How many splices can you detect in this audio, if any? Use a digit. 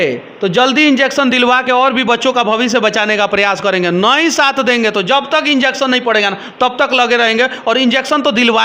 0